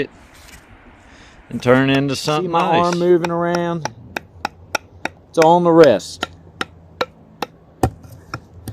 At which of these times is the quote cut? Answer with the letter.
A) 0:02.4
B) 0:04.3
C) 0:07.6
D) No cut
A